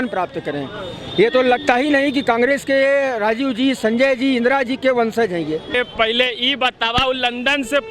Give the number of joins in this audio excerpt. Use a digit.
1